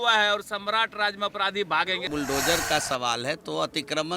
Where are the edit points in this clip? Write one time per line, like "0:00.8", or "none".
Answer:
0:02.0